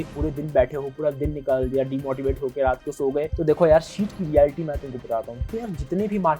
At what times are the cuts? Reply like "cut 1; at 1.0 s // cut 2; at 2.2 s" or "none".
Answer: cut 1; at 3.3 s